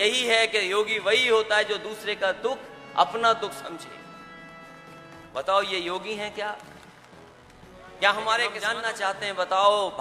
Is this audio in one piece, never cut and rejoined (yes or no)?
no